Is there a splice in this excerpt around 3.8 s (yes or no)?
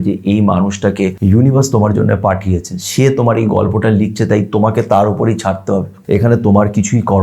no